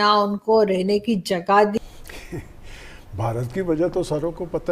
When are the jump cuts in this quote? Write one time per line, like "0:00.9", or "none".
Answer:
0:01.7